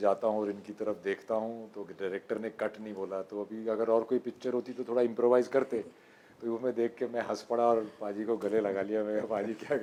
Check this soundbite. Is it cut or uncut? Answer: uncut